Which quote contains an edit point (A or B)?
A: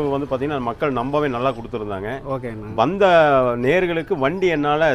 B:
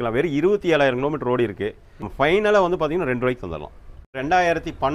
B